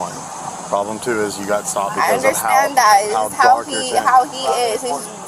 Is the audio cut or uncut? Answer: uncut